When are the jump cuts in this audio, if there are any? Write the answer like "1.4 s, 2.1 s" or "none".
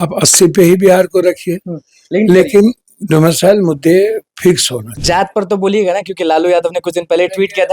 4.9 s